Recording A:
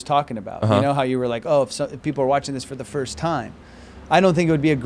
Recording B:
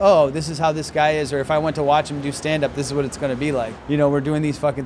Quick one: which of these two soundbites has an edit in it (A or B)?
B